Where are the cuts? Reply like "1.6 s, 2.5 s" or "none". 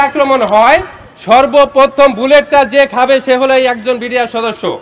none